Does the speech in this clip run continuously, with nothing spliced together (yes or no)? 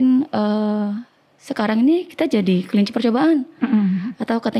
yes